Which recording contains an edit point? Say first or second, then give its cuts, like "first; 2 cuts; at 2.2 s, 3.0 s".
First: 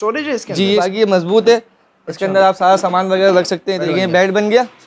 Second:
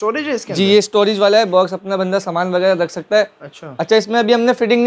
first; 2 cuts; at 0.9 s, 3.8 s